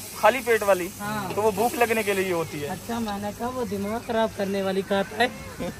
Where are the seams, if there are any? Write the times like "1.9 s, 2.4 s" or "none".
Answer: none